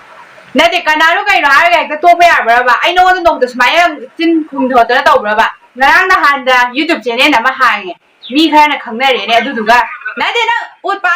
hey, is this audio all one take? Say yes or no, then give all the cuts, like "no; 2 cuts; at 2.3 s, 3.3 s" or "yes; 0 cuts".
no; 2 cuts; at 5.6 s, 10.0 s